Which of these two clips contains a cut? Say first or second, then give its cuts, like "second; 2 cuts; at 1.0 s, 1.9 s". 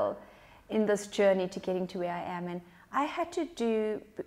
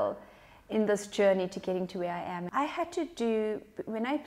second; 1 cut; at 2.4 s